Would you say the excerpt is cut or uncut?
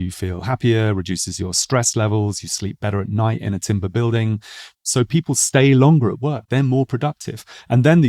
cut